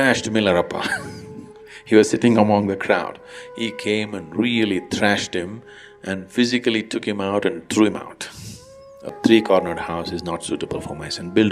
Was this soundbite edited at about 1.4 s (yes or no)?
no